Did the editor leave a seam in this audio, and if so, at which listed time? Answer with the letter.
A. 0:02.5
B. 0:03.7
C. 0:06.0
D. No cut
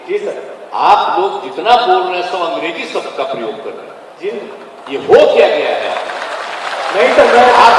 D